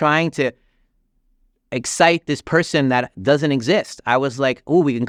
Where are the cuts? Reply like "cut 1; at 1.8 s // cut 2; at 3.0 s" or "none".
none

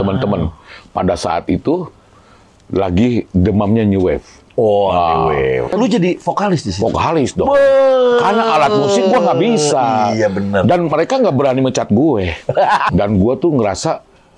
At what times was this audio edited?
cut 1; at 5.7 s // cut 2; at 12.9 s

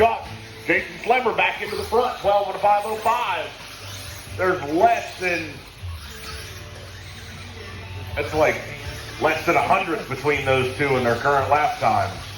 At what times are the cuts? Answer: none

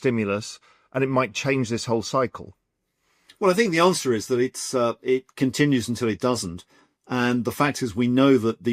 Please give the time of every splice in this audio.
none

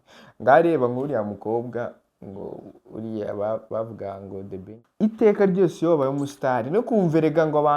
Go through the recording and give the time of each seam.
cut 1; at 4.8 s

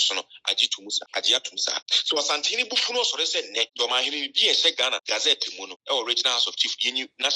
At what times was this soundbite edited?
cut 1; at 1.0 s // cut 2; at 1.9 s // cut 3; at 3.7 s // cut 4; at 5.3 s

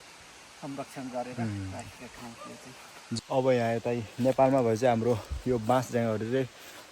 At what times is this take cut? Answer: cut 1; at 3.0 s

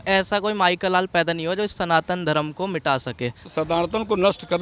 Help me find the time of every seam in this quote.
cut 1; at 3.4 s

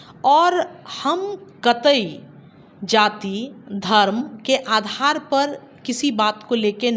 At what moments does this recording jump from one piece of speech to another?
none

